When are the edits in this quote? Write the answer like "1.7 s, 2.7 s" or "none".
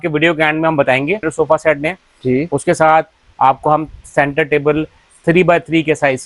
1.3 s